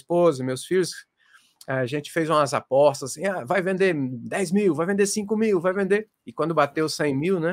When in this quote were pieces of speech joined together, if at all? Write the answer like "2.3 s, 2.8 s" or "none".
none

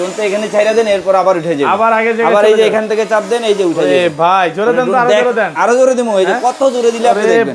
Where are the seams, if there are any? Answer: none

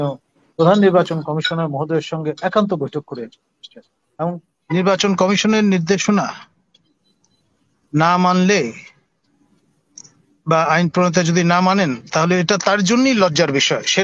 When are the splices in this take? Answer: 4.5 s

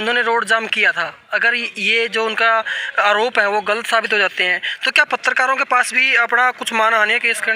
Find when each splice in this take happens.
none

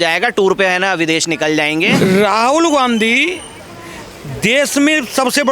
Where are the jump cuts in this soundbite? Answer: 1.9 s

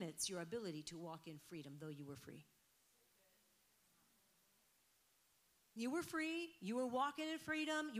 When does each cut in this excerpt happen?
none

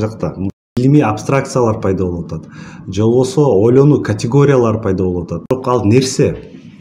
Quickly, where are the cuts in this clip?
0.8 s, 5.5 s

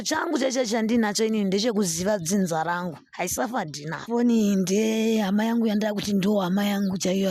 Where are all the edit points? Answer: 4.0 s

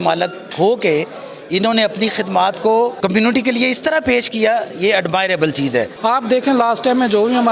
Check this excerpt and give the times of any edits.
2.9 s, 5.9 s

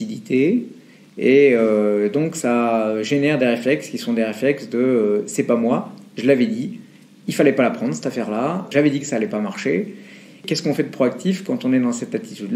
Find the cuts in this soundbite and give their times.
none

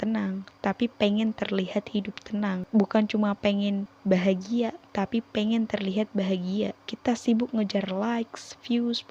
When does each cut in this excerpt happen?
2.6 s, 3.9 s, 6.8 s

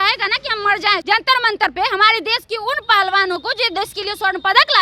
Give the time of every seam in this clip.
1.0 s

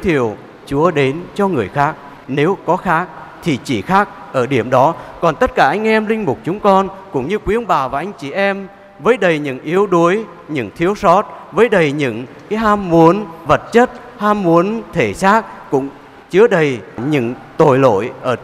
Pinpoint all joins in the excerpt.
none

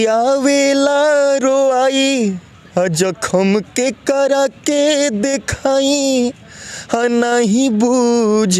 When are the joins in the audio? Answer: none

